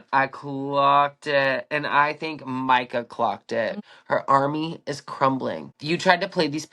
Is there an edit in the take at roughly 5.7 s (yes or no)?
yes